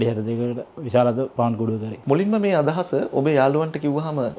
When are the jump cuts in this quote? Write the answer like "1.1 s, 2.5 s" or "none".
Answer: none